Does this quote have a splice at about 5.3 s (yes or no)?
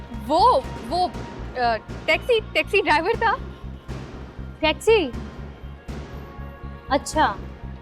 no